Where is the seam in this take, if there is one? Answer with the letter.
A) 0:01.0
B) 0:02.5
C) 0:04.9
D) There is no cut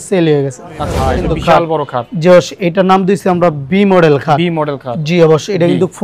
A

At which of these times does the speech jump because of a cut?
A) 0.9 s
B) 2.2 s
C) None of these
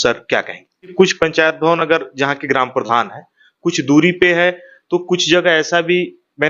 A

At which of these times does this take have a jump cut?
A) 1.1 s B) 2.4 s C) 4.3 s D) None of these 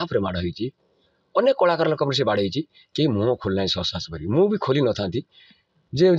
D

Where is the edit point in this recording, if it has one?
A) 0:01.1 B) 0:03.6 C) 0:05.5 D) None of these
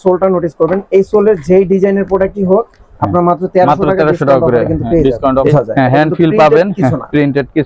C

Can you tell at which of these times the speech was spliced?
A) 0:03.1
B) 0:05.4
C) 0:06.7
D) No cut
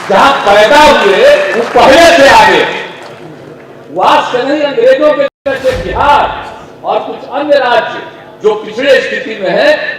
B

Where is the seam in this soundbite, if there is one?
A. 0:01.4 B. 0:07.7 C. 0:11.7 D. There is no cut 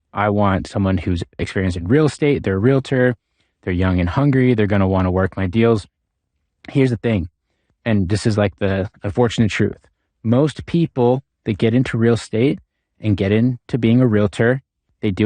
A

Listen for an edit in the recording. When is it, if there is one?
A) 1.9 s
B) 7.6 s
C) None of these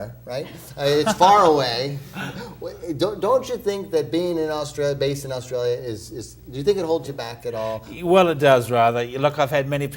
B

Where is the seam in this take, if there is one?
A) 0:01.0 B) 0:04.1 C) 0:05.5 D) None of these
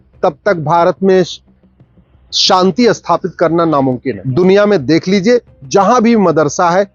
B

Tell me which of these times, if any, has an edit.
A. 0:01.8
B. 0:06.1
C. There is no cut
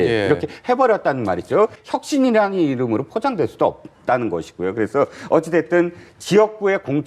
A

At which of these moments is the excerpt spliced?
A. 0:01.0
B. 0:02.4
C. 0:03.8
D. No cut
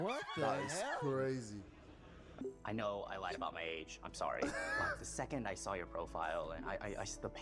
B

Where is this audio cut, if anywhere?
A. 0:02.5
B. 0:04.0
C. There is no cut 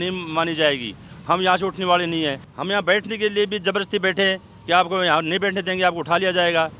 A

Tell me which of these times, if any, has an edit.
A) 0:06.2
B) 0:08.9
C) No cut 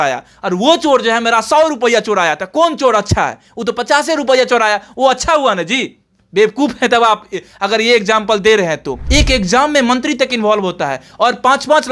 B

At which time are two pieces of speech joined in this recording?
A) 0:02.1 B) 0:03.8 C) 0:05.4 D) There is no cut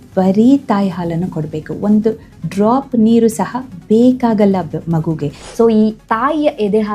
C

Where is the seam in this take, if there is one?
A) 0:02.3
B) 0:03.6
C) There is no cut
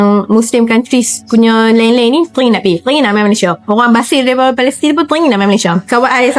C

